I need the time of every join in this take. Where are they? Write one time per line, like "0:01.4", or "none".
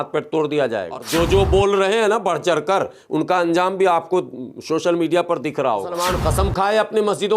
0:01.0
0:05.9